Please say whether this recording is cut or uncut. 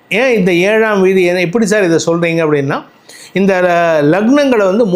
uncut